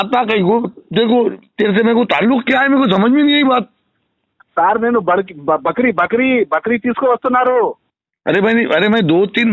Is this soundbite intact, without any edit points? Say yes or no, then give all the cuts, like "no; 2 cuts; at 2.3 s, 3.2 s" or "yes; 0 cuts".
yes; 0 cuts